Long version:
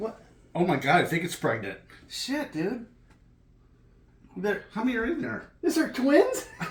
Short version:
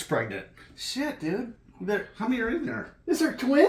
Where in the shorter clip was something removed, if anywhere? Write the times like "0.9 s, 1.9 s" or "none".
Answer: 1.6 s